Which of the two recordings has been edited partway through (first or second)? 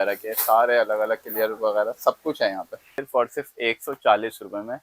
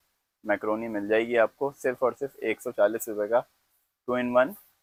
first